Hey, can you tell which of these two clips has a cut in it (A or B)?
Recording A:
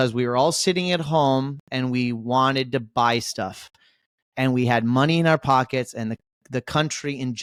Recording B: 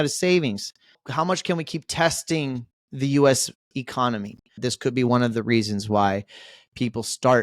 B